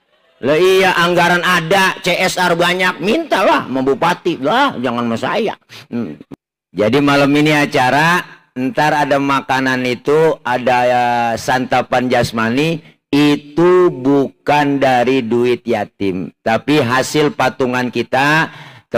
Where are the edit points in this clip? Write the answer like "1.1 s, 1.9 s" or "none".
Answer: 6.2 s

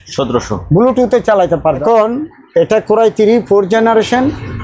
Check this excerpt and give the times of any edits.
1.8 s

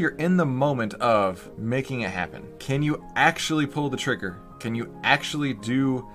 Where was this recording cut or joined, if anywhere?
1.5 s, 2.5 s, 4.5 s

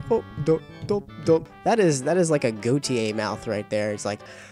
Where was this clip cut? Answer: 1.5 s

